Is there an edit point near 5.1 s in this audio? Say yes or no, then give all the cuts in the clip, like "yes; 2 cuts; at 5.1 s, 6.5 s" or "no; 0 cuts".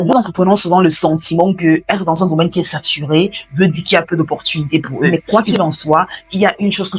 yes; 1 cut; at 5.1 s